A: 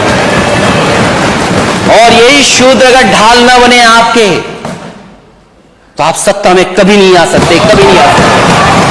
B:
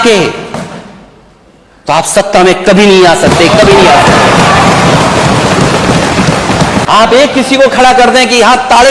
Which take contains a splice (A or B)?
B